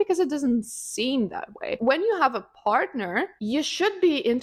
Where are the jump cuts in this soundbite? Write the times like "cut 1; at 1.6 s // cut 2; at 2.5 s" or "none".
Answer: none